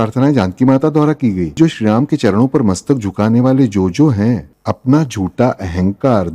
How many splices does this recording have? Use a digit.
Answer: 2